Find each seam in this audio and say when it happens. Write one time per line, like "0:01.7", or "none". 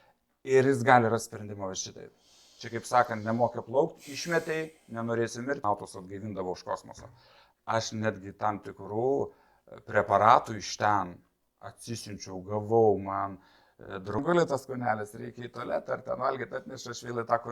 0:05.6
0:14.2